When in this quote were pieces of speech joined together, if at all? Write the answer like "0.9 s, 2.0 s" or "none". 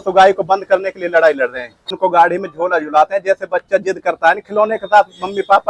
2.0 s